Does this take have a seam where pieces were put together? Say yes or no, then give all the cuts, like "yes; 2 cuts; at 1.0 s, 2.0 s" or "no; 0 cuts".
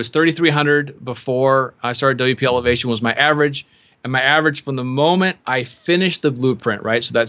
no; 0 cuts